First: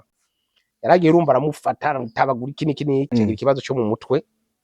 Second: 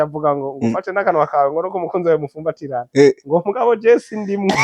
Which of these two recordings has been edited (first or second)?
first